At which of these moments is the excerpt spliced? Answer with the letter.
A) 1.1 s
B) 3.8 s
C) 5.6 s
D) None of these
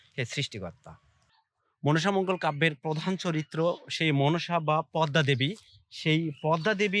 A